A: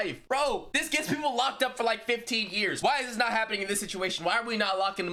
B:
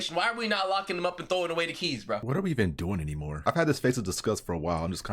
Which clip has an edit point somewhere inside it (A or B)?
B